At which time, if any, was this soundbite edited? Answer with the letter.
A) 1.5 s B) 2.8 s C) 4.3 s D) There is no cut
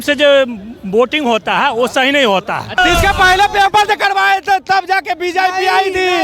B